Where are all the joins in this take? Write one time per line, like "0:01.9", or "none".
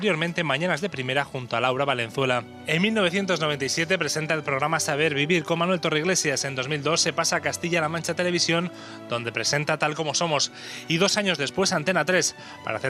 0:01.4